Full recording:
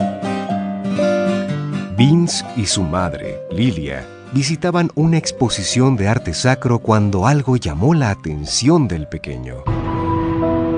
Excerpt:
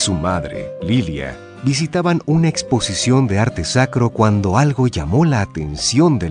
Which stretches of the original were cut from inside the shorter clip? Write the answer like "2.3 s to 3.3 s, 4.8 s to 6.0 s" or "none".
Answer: none